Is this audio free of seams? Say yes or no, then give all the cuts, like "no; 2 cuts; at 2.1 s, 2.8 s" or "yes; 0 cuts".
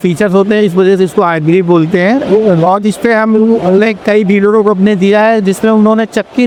yes; 0 cuts